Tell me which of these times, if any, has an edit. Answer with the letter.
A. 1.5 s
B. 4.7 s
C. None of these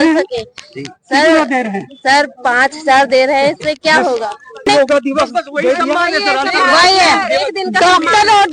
B